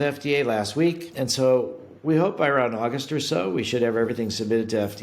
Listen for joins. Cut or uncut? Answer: cut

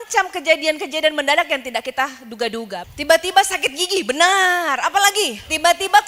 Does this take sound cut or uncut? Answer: cut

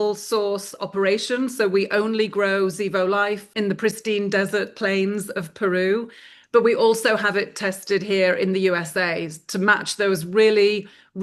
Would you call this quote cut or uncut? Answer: cut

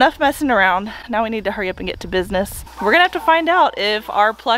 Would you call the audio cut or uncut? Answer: cut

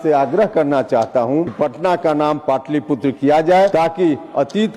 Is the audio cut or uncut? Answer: cut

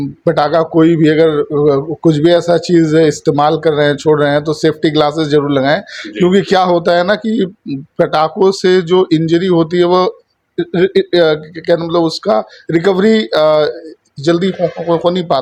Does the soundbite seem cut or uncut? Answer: uncut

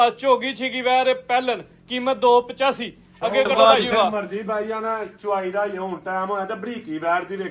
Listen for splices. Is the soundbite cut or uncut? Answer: cut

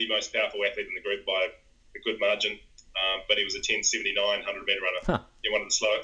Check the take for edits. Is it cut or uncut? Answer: uncut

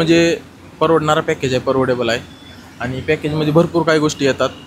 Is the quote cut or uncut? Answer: uncut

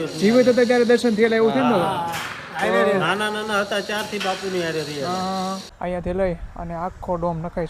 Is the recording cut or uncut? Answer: cut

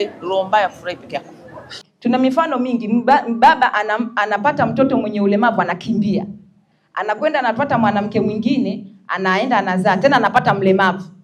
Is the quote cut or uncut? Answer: cut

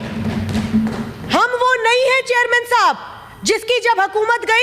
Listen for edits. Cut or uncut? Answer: uncut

